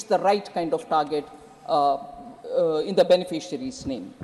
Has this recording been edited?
no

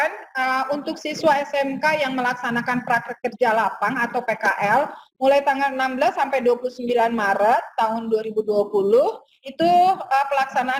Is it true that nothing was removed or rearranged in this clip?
yes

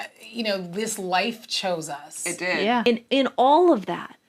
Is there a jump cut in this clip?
yes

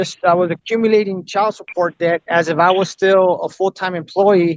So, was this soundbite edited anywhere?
no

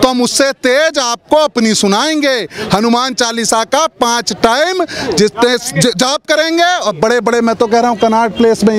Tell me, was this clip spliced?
no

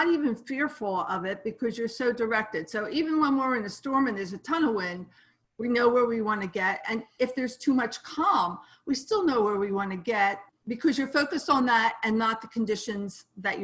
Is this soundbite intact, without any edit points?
no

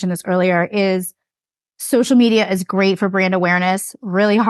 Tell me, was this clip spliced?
no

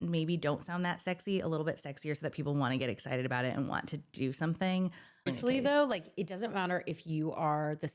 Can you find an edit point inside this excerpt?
yes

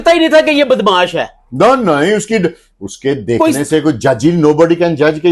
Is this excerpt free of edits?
yes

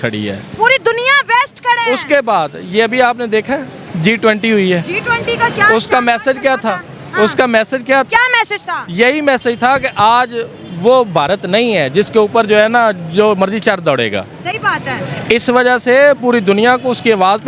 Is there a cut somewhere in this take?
no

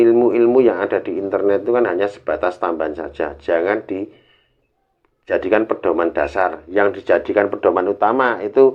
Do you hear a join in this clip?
no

